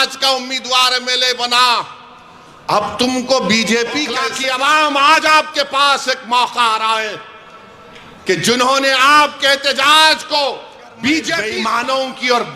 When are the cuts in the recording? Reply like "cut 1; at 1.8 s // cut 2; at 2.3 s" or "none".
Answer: cut 1; at 4.3 s // cut 2; at 11.5 s